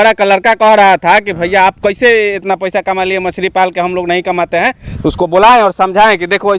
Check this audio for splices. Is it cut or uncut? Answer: uncut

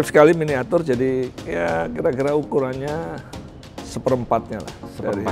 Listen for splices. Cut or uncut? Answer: uncut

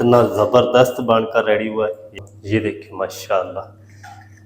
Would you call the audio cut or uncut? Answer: cut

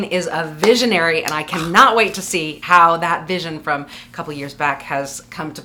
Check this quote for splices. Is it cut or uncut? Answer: cut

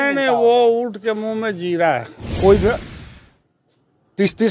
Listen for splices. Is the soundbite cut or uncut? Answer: cut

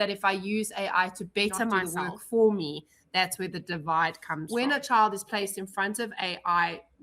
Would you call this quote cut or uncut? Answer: cut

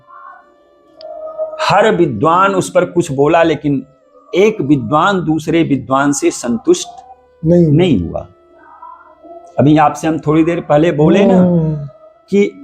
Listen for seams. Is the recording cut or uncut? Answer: uncut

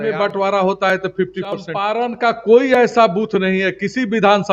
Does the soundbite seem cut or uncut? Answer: cut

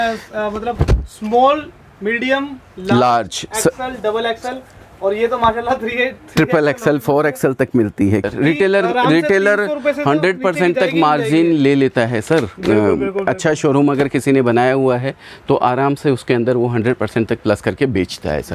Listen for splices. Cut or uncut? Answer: cut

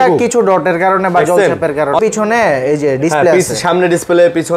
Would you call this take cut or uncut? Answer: cut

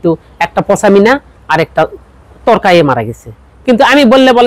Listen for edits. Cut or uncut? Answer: uncut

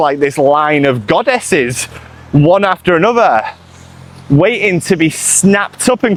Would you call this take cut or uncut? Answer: uncut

